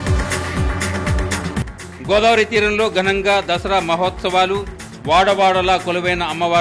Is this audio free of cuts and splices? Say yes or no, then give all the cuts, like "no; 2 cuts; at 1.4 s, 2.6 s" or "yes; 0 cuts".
no; 1 cut; at 1.5 s